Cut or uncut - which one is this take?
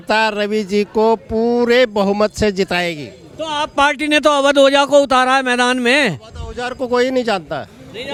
uncut